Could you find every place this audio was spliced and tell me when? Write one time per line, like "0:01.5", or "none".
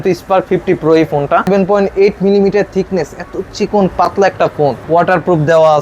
0:01.5
0:04.8